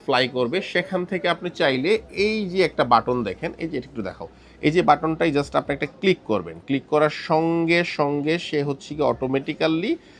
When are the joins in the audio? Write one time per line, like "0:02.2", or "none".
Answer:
none